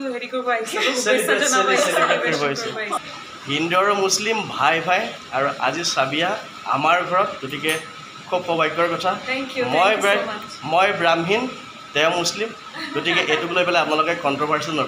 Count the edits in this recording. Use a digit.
1